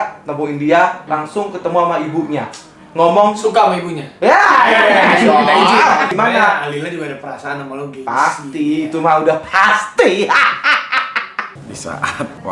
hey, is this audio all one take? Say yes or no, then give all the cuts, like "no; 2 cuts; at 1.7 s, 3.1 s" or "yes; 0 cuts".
no; 3 cuts; at 1.0 s, 6.1 s, 11.5 s